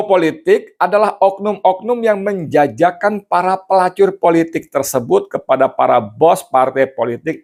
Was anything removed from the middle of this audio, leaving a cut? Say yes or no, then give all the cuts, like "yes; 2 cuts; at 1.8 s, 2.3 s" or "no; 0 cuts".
no; 0 cuts